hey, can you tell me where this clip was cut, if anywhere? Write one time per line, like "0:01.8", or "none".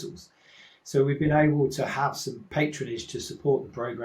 0:02.3